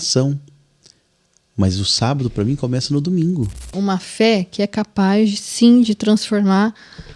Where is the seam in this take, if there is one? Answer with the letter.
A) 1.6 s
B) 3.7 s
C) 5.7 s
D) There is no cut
B